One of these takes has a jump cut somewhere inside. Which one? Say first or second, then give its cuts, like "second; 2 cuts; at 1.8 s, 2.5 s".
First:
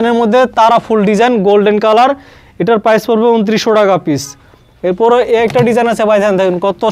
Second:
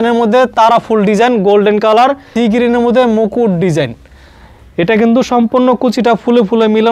second; 1 cut; at 2.3 s